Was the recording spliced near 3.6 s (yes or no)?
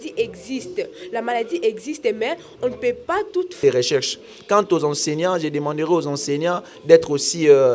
yes